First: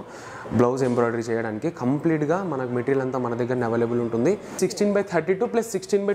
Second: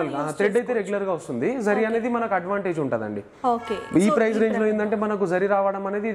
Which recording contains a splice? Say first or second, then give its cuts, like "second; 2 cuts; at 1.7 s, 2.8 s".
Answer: first; 1 cut; at 4.6 s